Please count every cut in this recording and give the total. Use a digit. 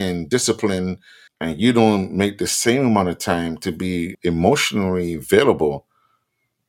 1